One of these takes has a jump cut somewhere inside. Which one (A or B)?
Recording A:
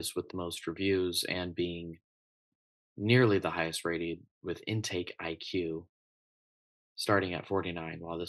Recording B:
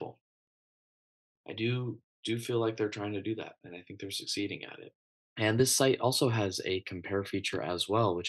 B